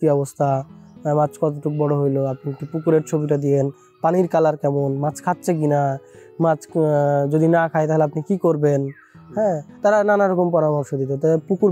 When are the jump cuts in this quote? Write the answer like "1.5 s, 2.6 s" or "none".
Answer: none